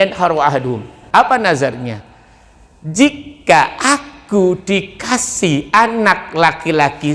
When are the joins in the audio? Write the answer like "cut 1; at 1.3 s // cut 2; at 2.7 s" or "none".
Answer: cut 1; at 1.0 s